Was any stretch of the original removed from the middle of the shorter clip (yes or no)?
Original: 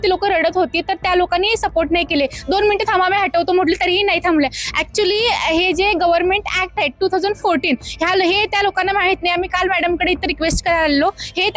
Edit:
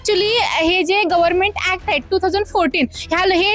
no